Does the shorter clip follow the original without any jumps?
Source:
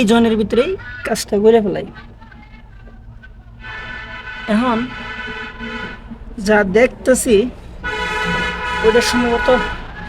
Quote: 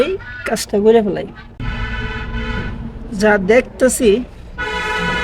no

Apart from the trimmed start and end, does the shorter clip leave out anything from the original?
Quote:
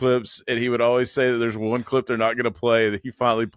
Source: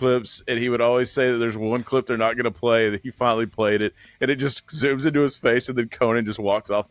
no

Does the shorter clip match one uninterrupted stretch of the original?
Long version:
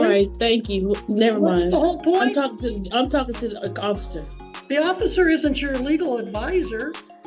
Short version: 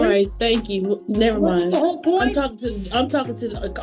yes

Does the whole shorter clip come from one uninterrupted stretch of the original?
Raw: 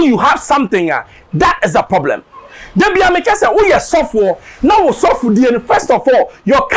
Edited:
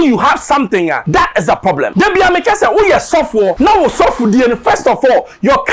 no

